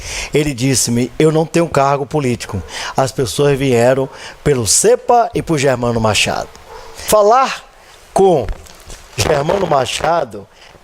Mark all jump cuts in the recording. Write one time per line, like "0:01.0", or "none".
0:06.0

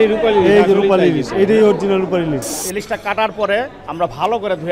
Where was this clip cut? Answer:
0:02.6

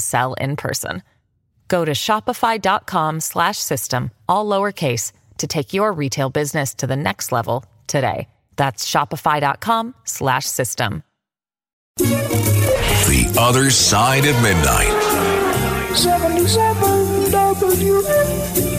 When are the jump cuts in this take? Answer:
0:11.7

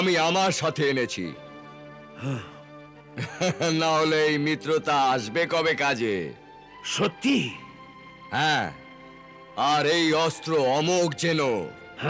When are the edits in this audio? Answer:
none

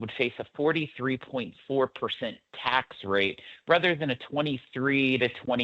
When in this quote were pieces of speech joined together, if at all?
none

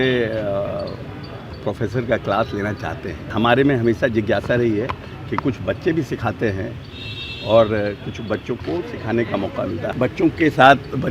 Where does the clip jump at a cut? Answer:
0:03.3
0:09.9

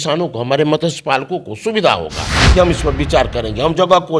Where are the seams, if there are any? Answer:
0:02.3

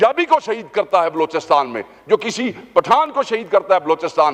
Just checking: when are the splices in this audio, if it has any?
none

